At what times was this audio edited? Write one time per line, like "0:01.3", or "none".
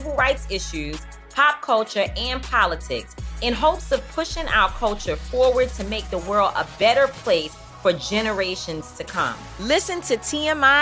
none